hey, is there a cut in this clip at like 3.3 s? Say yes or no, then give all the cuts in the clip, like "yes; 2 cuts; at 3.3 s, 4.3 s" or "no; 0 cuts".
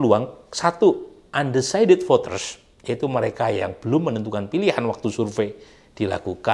no; 0 cuts